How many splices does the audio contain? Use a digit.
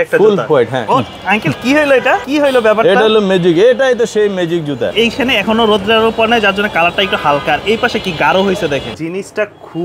4